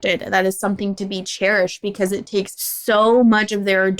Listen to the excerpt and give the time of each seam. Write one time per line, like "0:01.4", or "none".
0:02.6